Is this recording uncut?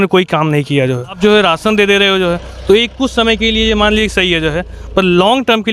no; 1 cut; at 1.2 s

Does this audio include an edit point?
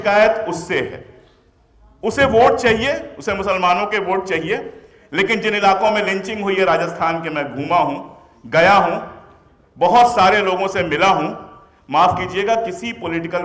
no; 0 cuts

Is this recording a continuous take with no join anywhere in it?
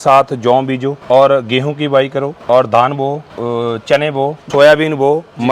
no; 4 cuts; at 1.0 s, 2.3 s, 3.3 s, 4.5 s

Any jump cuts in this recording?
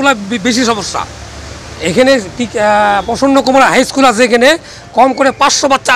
no; 0 cuts

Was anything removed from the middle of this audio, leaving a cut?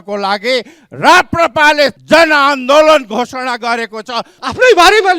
yes; 2 cuts; at 2.0 s, 4.3 s

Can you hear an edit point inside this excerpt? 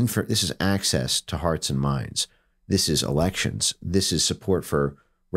no; 0 cuts

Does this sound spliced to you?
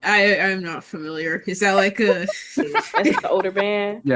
yes; 1 cut; at 3.2 s

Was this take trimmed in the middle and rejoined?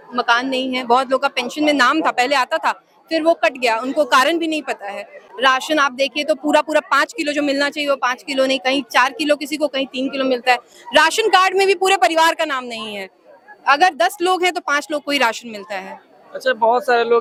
no; 0 cuts

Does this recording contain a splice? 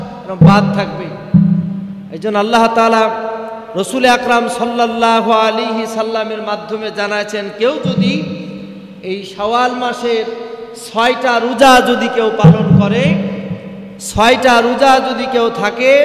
no; 0 cuts

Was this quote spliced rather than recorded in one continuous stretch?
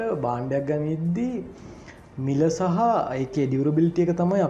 no; 0 cuts

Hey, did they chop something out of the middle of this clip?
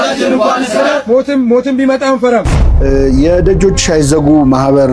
yes; 1 cut; at 2.5 s

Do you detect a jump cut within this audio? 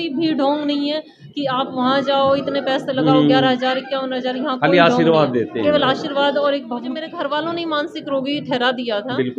yes; 1 cut; at 7.0 s

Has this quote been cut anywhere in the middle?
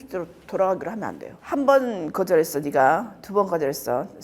yes; 1 cut; at 1.4 s

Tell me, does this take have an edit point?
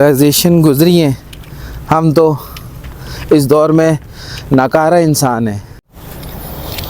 yes; 1 cut; at 5.7 s

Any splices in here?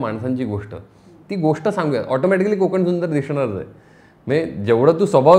no; 0 cuts

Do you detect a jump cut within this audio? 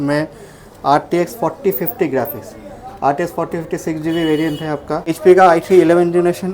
yes; 1 cut; at 5.1 s

